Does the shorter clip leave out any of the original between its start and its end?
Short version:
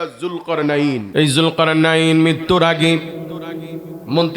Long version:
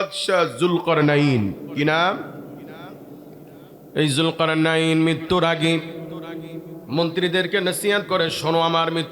yes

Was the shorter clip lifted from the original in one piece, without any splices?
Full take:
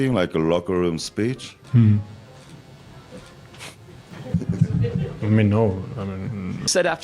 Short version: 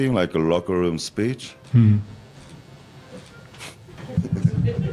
no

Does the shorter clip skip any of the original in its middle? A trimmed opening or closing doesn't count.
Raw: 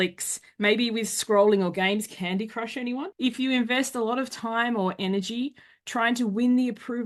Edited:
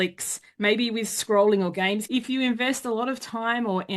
yes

